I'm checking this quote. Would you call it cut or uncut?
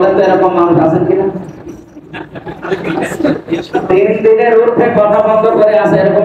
uncut